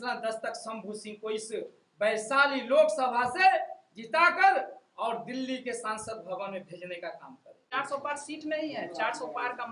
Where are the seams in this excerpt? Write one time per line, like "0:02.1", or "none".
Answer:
0:07.7